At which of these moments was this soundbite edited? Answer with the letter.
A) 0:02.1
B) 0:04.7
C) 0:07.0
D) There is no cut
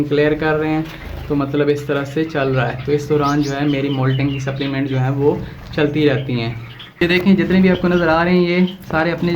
C